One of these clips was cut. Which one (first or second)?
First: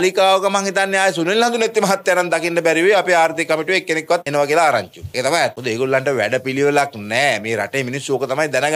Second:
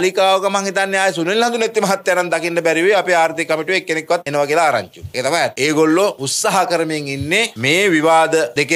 second